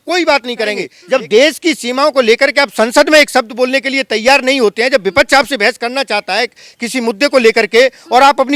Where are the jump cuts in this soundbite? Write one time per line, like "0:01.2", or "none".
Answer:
0:00.9

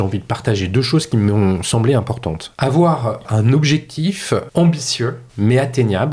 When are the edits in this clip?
0:02.5
0:03.3
0:04.5
0:05.2

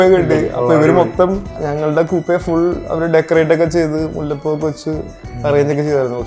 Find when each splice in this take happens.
0:01.6

